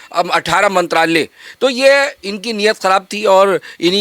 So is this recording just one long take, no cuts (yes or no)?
yes